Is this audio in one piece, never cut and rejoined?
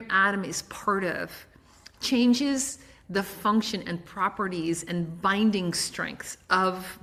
yes; 0 cuts

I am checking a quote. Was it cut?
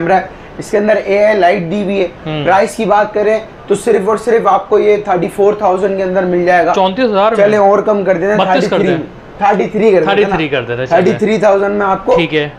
no; 0 cuts

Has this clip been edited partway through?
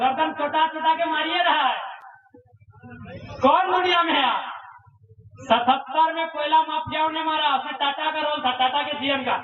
no; 0 cuts

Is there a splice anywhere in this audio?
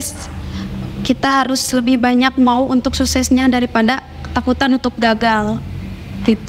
no; 0 cuts

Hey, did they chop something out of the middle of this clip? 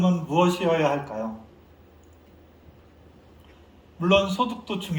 no; 0 cuts

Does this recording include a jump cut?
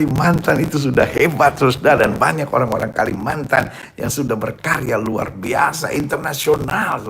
no; 0 cuts

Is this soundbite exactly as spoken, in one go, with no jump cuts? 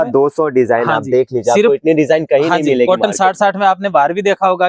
yes; 0 cuts

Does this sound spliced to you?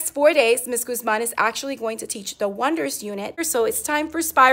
yes; 1 cut; at 3.4 s

